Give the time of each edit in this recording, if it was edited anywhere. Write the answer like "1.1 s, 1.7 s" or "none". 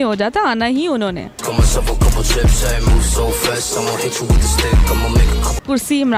none